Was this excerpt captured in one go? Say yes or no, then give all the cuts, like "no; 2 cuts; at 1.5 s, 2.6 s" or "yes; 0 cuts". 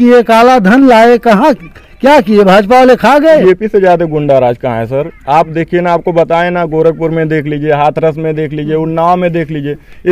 no; 1 cut; at 3.3 s